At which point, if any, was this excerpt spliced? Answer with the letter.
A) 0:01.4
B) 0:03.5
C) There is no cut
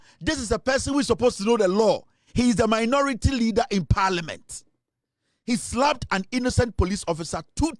C